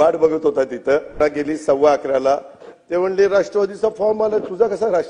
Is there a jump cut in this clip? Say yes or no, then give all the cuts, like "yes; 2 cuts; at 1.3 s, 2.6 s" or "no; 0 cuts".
yes; 1 cut; at 1.2 s